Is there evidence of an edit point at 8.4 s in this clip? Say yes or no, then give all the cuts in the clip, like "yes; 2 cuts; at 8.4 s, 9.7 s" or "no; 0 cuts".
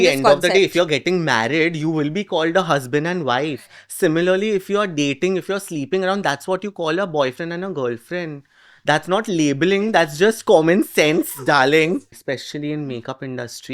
no; 1 cut; at 12.0 s